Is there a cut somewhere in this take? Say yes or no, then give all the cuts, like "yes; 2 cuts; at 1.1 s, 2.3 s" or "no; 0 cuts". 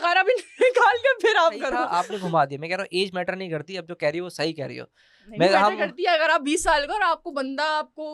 yes; 1 cut; at 1.8 s